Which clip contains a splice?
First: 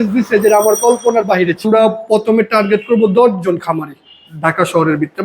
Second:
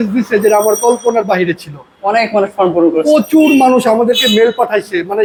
first; 1 cut; at 1.7 s

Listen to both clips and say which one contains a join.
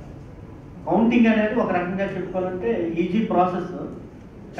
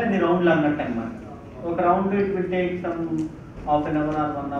second; 1 cut; at 3.5 s

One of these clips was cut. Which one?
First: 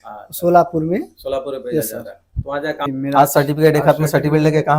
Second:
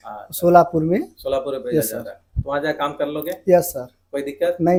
first; 1 cut; at 2.9 s

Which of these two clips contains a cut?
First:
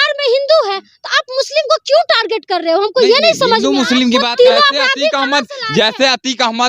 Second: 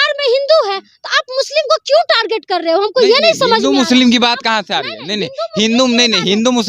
first; 1 cut; at 4.2 s

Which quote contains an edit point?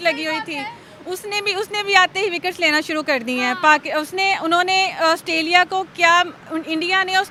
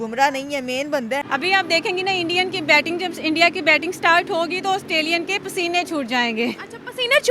second; 1 cut; at 1.2 s

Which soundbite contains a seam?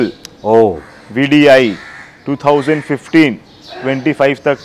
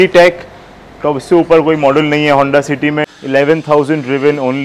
second; 1 cut; at 3.1 s

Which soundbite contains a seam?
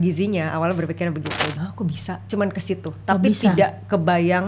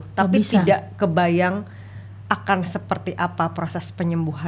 first; 1 cut; at 1.4 s

